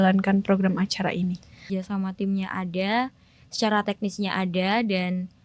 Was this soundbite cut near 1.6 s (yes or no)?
yes